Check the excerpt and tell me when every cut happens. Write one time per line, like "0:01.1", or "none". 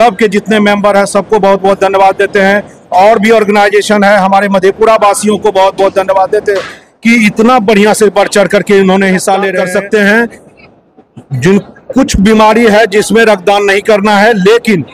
0:09.5